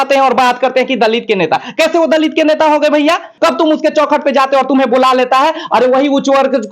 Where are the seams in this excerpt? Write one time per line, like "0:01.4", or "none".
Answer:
0:03.3